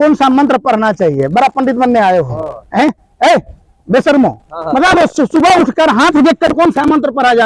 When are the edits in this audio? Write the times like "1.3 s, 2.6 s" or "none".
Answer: none